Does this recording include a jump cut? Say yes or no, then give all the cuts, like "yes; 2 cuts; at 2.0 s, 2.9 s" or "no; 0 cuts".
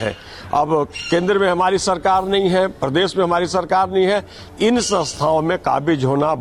no; 0 cuts